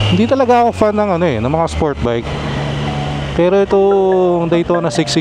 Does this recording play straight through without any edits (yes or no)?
yes